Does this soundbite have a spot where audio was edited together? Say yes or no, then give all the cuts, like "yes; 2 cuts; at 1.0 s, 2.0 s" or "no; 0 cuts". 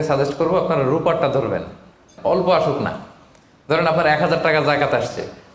yes; 1 cut; at 2.1 s